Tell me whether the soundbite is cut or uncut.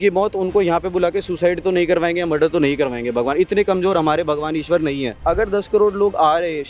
cut